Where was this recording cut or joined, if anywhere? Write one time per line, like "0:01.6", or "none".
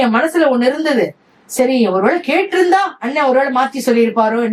none